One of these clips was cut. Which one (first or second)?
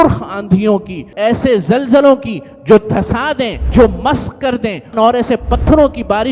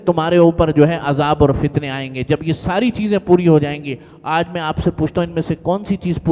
first